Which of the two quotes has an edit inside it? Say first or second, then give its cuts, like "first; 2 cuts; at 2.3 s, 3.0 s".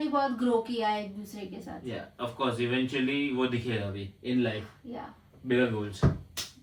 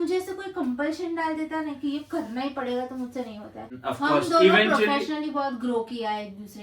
second; 1 cut; at 3.7 s